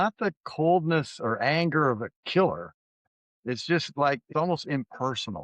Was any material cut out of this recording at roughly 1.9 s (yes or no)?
no